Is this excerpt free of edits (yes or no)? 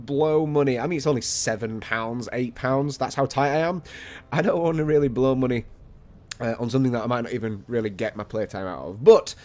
no